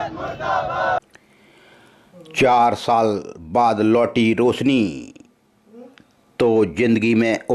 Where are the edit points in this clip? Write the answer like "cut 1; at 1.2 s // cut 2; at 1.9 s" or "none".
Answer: cut 1; at 1.0 s

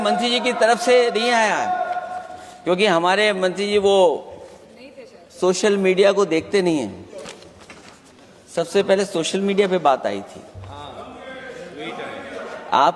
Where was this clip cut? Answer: none

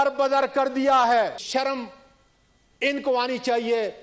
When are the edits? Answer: cut 1; at 1.4 s

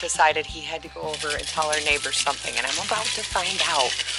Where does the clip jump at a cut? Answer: none

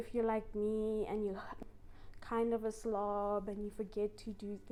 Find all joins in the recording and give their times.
none

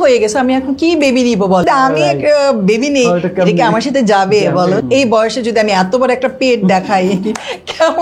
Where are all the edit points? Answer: cut 1; at 1.6 s // cut 2; at 4.8 s

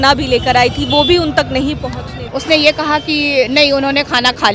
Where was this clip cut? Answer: cut 1; at 2.2 s

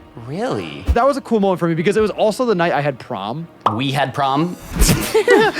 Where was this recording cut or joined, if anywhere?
cut 1; at 0.9 s // cut 2; at 3.9 s // cut 3; at 4.7 s

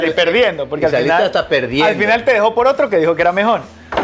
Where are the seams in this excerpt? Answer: none

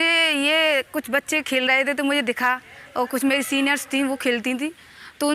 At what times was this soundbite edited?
none

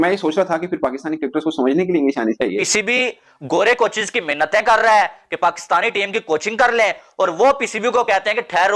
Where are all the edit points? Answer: cut 1; at 2.6 s

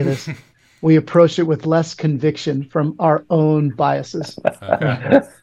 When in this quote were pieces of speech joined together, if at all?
none

